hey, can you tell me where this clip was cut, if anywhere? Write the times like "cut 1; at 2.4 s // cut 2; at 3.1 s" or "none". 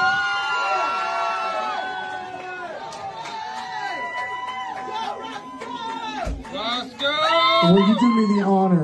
none

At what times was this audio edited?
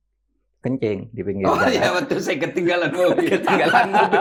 none

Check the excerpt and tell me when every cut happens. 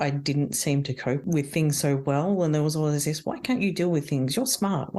cut 1; at 1.2 s

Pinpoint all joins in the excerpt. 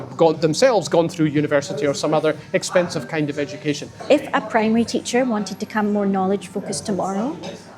cut 1; at 3.9 s

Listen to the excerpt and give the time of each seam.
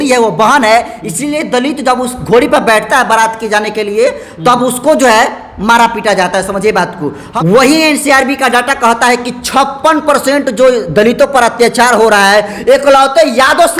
cut 1; at 7.2 s

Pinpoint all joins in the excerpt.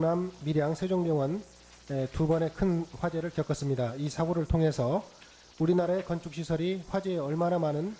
none

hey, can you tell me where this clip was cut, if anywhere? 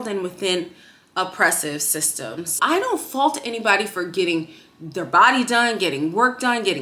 cut 1; at 2.5 s

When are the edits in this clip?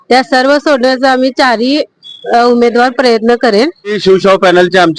cut 1; at 4.0 s

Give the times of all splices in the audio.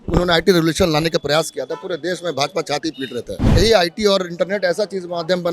cut 1; at 3.5 s

